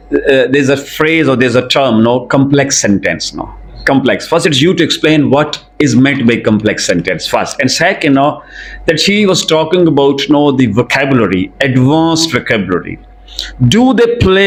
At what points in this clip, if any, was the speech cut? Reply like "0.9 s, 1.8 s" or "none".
none